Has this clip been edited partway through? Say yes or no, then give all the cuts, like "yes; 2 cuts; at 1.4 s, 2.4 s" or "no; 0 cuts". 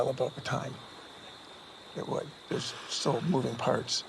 yes; 1 cut; at 2.4 s